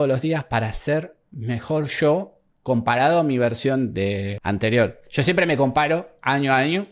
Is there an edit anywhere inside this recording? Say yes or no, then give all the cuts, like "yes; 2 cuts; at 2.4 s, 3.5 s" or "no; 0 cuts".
no; 0 cuts